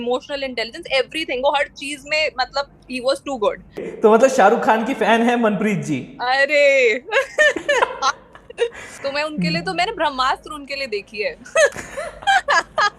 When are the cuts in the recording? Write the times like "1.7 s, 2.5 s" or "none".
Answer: 3.9 s, 8.9 s